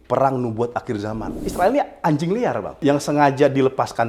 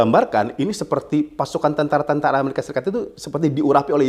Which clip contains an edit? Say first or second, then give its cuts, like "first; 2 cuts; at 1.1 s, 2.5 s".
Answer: first; 2 cuts; at 1.4 s, 2.9 s